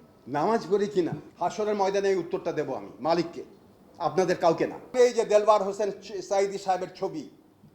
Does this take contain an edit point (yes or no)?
yes